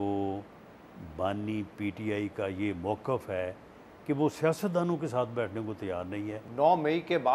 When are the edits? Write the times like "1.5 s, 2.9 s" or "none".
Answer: 6.4 s